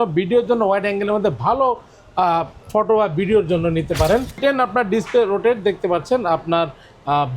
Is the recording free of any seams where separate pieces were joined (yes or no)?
no